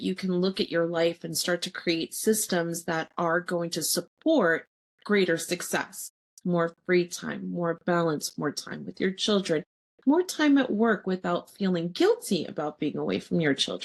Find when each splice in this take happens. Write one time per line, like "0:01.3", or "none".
none